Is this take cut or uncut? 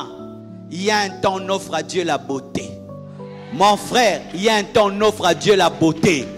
uncut